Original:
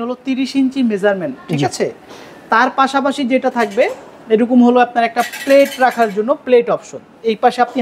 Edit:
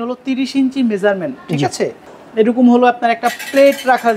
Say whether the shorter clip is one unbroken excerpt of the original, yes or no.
no